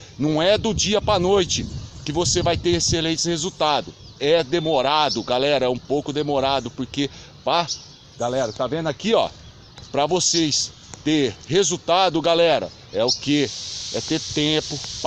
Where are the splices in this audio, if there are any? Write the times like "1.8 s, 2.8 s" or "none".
none